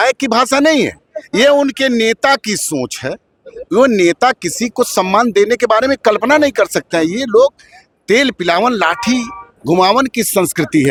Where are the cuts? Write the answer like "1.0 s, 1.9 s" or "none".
none